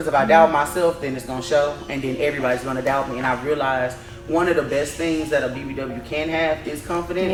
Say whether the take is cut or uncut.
uncut